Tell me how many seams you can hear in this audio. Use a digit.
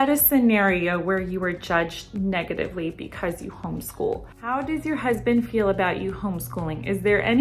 1